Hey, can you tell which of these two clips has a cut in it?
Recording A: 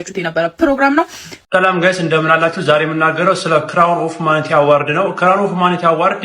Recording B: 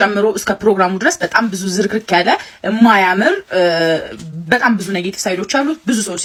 A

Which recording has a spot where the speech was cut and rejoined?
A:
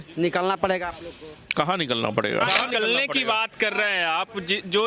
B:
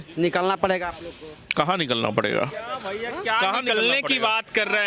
A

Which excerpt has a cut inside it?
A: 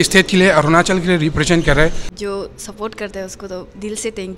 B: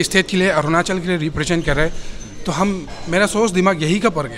A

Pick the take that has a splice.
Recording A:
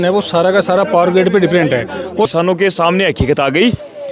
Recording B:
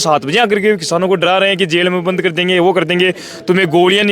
A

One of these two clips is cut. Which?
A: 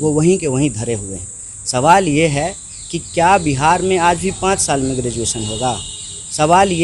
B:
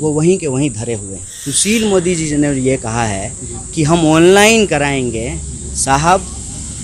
B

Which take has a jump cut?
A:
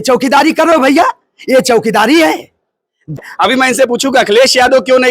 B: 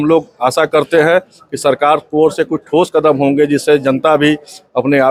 A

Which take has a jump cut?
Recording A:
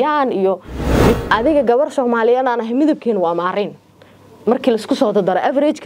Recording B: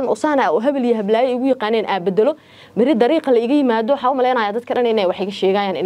A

